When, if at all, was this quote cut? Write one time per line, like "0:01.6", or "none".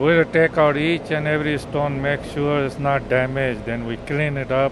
none